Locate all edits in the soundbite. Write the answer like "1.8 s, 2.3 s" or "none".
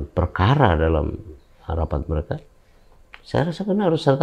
none